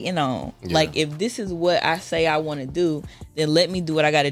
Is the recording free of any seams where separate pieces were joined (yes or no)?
yes